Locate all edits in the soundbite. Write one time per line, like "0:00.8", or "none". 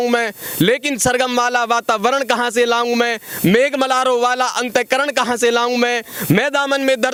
none